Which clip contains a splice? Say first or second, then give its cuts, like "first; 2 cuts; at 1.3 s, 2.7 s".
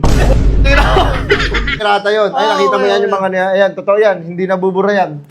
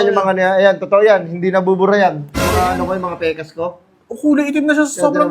first; 1 cut; at 1.8 s